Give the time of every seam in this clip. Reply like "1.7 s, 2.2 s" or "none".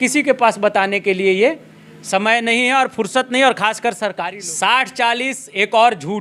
4.3 s

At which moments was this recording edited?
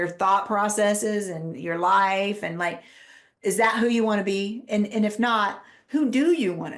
none

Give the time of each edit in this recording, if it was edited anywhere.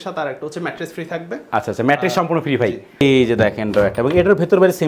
3.0 s

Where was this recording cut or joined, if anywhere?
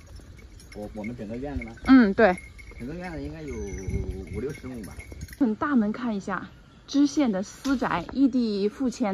5.2 s

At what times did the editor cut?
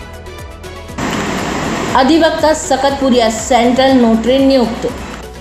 0.9 s

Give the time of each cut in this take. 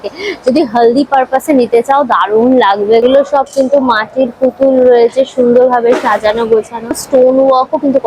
3.0 s, 7.0 s

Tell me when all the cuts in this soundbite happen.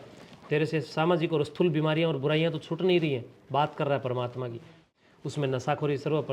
4.8 s

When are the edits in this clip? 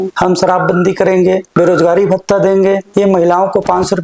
1.5 s, 2.8 s

